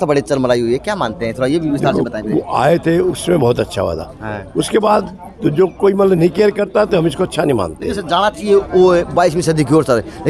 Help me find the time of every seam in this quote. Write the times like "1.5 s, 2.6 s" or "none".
none